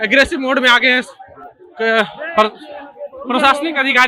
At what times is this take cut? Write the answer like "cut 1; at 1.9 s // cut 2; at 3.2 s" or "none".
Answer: none